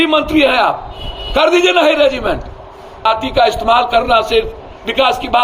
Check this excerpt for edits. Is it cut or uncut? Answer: cut